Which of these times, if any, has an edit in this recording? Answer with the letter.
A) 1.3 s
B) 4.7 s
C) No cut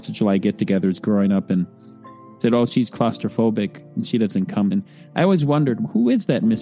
B